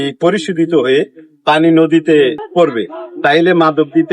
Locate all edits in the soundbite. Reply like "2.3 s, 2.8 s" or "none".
2.4 s